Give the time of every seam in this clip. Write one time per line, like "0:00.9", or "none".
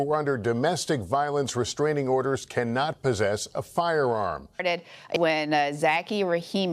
0:04.4